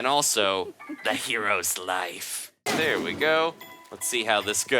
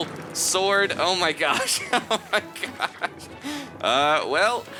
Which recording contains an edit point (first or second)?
first